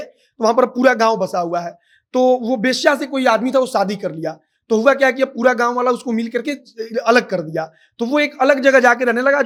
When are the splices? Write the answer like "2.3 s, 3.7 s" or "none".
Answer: none